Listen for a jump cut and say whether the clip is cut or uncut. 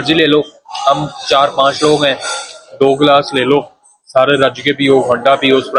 uncut